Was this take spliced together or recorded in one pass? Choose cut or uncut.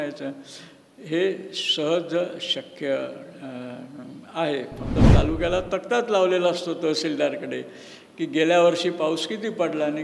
cut